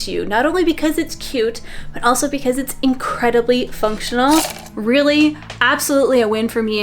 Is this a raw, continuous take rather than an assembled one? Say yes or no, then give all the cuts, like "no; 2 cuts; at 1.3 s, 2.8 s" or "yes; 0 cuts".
no; 1 cut; at 4.7 s